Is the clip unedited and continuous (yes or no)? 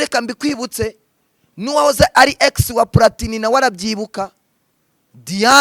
yes